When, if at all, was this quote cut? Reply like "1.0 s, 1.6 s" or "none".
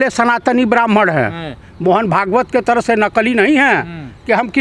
none